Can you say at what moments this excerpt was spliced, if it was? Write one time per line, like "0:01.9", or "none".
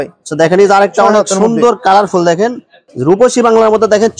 0:02.9